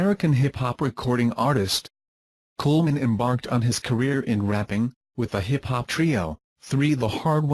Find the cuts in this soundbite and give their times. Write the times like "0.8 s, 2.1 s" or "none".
3.0 s